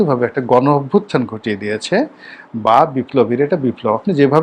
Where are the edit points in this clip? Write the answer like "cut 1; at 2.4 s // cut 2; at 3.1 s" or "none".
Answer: none